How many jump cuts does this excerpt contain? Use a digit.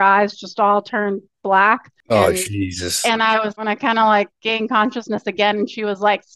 2